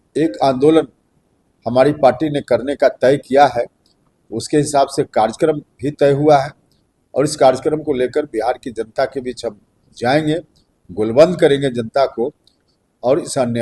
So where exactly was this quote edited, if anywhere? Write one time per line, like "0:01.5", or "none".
none